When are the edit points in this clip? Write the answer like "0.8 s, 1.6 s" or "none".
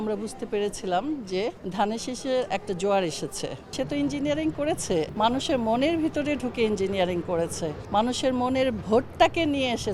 1.6 s, 3.7 s, 5.1 s, 7.8 s